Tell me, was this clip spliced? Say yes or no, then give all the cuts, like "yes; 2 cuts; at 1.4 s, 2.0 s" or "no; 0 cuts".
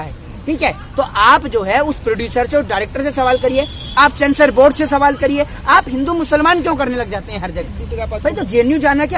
no; 0 cuts